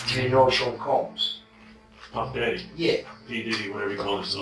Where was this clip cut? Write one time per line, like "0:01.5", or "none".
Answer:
none